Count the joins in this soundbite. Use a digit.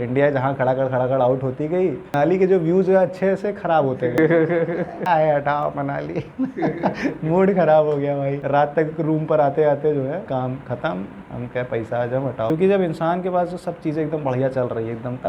1